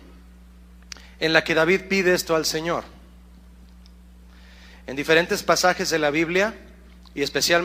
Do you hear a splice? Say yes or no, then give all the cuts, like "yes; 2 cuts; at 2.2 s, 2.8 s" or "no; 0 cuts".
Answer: no; 0 cuts